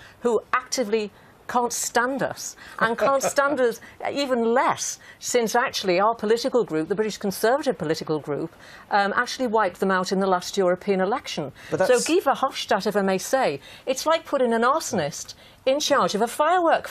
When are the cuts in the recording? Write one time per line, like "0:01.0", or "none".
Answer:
0:10.5